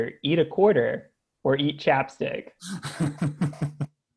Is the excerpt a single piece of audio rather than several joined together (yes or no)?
yes